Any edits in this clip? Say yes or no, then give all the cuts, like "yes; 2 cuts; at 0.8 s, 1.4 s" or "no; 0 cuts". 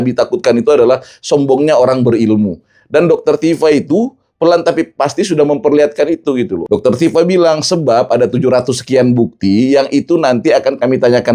yes; 1 cut; at 6.6 s